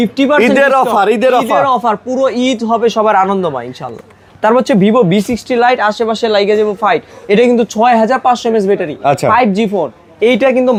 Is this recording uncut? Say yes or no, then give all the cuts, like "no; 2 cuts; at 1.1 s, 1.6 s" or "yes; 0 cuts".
yes; 0 cuts